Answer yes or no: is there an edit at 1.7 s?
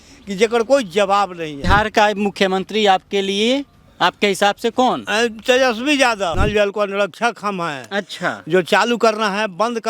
yes